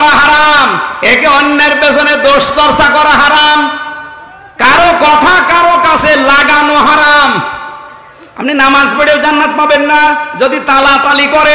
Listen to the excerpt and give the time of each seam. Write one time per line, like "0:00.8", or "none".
none